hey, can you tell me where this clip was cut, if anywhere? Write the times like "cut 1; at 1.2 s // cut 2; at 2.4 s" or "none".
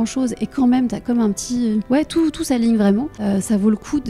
cut 1; at 1.8 s // cut 2; at 3.1 s